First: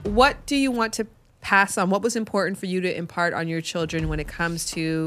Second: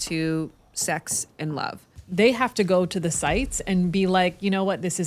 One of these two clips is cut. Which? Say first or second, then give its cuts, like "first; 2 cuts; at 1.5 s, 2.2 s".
second; 1 cut; at 2.0 s